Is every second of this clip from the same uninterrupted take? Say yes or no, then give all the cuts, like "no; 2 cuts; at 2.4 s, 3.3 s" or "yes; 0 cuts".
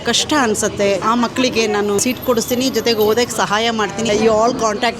no; 3 cuts; at 1.0 s, 2.0 s, 4.1 s